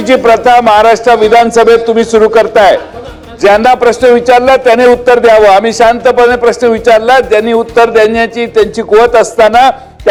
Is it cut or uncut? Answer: uncut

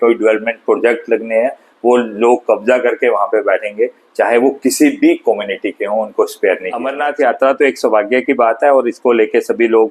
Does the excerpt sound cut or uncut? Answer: cut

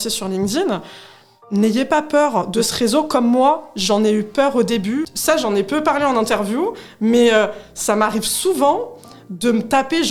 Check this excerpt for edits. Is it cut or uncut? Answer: cut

